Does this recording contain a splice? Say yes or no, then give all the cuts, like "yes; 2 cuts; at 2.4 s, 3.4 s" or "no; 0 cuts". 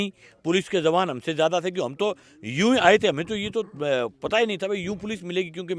no; 0 cuts